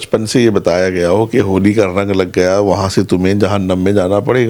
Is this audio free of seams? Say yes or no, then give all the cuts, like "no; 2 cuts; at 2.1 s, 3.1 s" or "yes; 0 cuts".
yes; 0 cuts